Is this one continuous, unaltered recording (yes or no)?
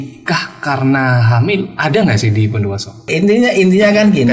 no